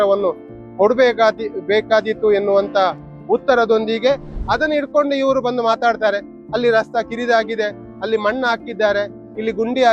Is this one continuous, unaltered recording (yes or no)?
no